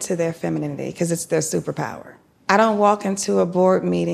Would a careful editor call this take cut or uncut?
cut